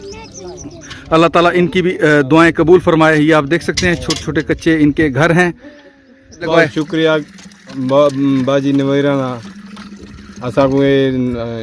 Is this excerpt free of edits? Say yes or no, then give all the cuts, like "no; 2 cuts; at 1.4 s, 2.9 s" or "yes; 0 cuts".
no; 1 cut; at 6.4 s